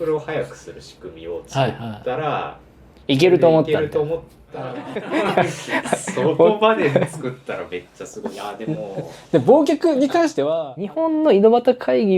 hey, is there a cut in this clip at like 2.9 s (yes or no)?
no